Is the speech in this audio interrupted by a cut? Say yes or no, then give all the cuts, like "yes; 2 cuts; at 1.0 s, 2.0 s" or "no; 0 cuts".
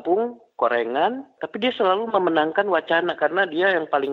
yes; 1 cut; at 1.4 s